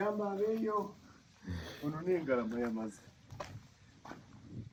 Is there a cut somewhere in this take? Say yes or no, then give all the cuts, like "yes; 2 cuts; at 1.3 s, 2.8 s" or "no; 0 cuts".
no; 0 cuts